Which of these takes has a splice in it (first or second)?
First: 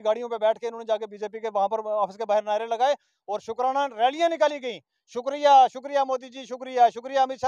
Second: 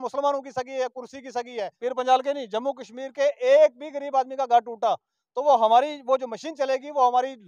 second